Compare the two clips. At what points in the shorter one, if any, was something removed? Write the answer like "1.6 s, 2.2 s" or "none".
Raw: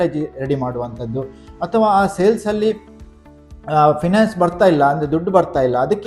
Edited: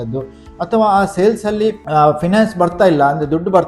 1.8 s